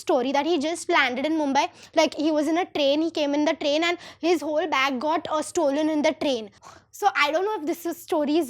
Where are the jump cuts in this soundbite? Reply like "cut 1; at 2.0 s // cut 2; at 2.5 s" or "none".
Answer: cut 1; at 6.6 s